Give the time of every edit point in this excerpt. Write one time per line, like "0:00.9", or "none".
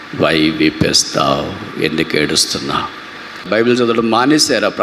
0:03.5